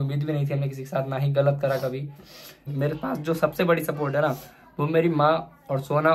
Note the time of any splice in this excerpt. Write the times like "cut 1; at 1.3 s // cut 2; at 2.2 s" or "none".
cut 1; at 2.7 s